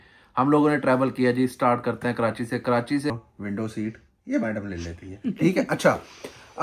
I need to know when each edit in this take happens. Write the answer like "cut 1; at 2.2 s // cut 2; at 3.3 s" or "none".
cut 1; at 3.1 s